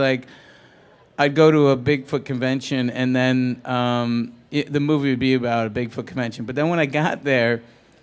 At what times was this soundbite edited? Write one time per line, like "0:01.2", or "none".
0:01.4